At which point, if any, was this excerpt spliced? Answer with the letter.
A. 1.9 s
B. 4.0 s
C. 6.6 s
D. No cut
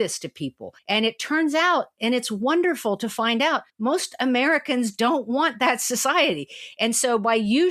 D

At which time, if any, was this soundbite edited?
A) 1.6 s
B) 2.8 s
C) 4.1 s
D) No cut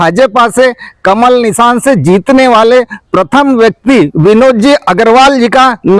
C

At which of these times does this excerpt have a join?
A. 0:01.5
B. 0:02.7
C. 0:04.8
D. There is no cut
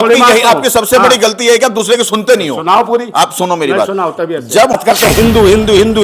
C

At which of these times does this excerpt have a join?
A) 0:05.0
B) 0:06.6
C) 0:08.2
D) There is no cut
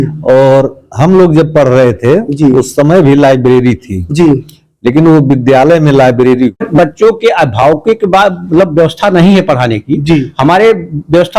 B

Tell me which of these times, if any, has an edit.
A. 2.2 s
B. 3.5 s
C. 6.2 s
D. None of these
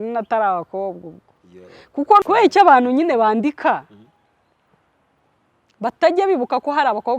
A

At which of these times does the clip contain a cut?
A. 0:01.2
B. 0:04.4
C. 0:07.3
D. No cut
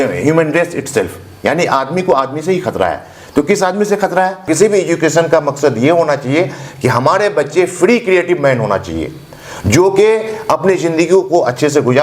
B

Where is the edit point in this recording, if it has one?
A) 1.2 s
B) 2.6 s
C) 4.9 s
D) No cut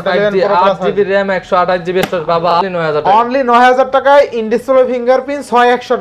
B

